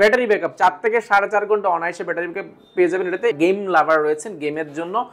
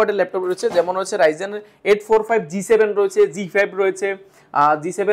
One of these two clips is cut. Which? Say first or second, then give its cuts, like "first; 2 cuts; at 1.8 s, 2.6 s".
first; 1 cut; at 3.4 s